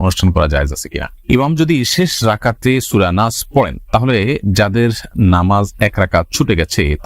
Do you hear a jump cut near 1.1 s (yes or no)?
yes